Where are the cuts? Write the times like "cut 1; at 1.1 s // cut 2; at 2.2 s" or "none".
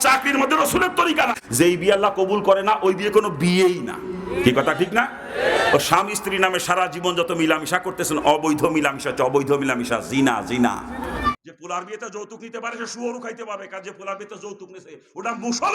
cut 1; at 1.4 s // cut 2; at 11.3 s

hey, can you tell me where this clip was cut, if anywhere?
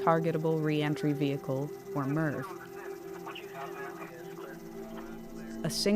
none

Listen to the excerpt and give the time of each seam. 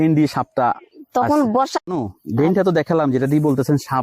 cut 1; at 1.8 s

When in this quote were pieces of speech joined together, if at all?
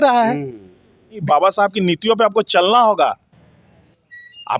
cut 1; at 1.2 s

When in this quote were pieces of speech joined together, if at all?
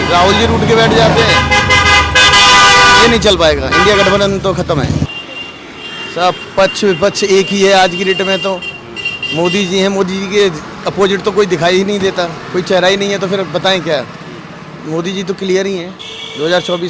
cut 1; at 5.1 s

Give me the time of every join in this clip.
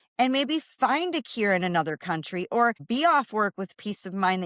cut 1; at 2.8 s

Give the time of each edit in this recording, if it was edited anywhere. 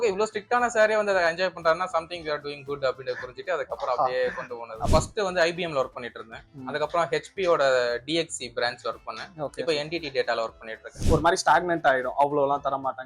cut 1; at 4.9 s // cut 2; at 11.0 s

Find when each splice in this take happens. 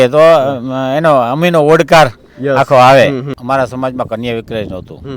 cut 1; at 3.3 s

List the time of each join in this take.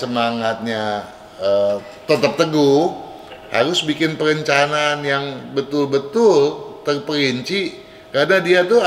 none

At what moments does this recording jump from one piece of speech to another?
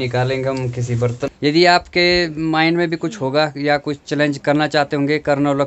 cut 1; at 1.2 s

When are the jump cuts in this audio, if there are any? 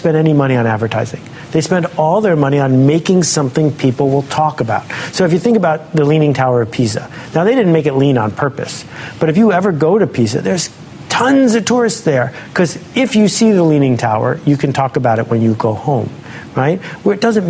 none

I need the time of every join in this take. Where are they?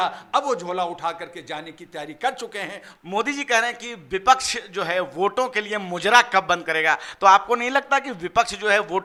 none

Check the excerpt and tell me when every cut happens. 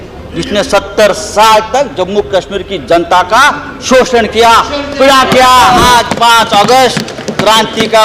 cut 1; at 5.8 s

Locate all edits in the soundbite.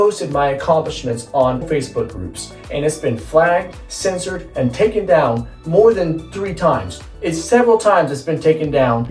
none

